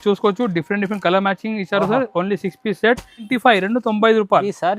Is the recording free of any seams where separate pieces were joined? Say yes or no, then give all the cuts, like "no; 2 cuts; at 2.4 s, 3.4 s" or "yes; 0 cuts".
no; 1 cut; at 3.3 s